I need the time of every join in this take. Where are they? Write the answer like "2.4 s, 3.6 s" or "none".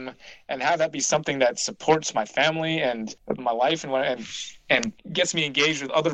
3.1 s, 5.1 s